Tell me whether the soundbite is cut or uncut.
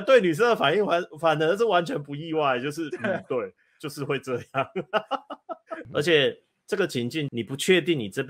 cut